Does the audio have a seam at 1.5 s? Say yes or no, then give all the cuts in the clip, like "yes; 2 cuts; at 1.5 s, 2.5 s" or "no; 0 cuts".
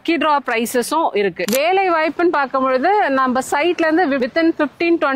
yes; 1 cut; at 1.5 s